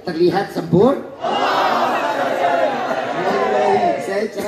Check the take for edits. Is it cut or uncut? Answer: cut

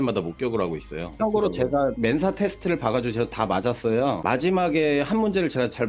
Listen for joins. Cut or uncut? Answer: cut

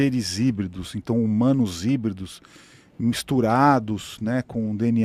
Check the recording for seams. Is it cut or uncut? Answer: uncut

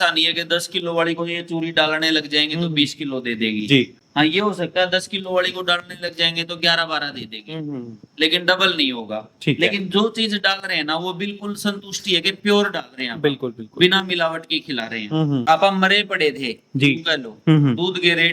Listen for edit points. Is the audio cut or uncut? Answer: cut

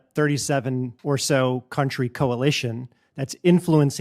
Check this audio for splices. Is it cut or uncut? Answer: cut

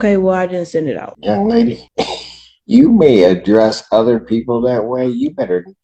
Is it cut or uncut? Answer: cut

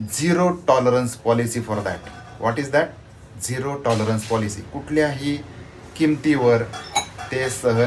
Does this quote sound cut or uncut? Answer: uncut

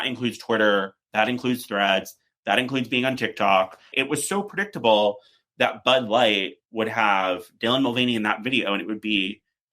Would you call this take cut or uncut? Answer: cut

